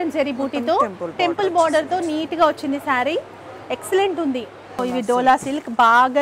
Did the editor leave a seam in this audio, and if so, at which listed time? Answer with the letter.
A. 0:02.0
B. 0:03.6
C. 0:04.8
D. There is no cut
C